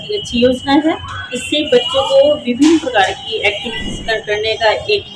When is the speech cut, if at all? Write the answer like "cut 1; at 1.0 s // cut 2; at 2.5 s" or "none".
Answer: none